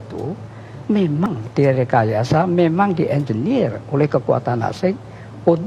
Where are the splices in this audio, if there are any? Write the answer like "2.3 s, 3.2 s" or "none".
1.3 s

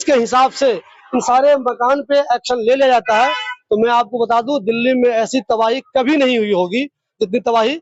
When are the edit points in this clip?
none

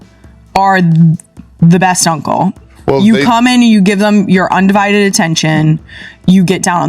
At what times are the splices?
none

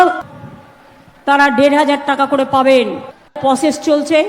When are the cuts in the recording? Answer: 3.4 s

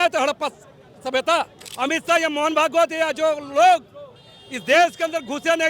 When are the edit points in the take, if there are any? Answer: 1.6 s

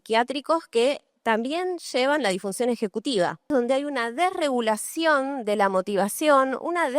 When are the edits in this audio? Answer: 3.5 s

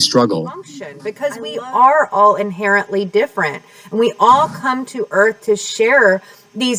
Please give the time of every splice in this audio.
1.0 s

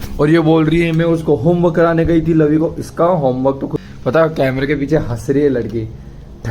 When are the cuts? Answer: 3.9 s

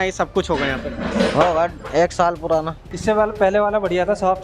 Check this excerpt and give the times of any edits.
2.8 s

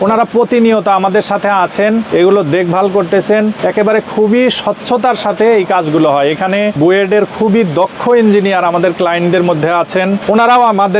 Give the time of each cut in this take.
2.1 s, 3.6 s, 6.8 s, 10.2 s

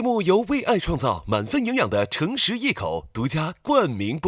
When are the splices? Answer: none

